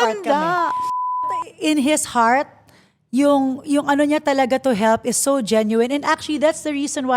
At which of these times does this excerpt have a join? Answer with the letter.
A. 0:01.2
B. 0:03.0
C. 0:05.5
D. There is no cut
A